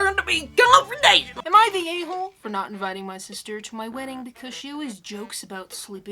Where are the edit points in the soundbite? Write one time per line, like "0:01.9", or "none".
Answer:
0:01.3